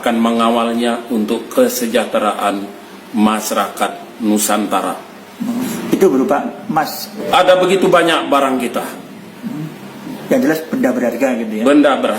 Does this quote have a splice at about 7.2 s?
yes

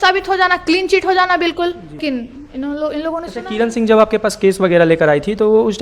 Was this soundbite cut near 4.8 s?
no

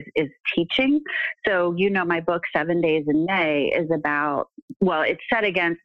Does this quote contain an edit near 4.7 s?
yes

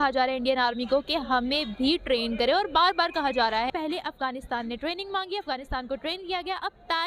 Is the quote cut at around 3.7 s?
yes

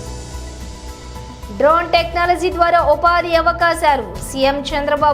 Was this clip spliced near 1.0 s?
yes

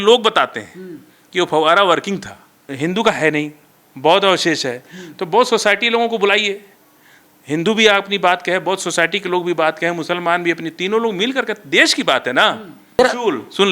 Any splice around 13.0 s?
yes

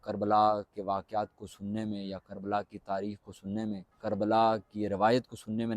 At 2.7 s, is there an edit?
no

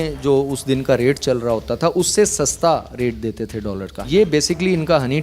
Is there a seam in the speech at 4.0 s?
yes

